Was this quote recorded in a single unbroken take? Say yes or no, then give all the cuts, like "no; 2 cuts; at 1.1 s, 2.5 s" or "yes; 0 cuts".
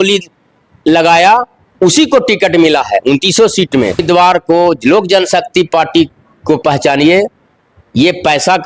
no; 1 cut; at 4.0 s